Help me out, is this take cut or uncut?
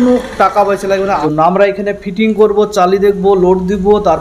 cut